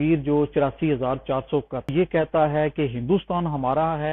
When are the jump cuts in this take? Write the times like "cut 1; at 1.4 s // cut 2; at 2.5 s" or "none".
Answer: cut 1; at 1.9 s